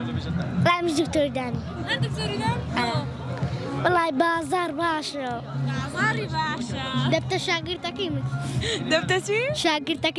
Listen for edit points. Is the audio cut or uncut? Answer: uncut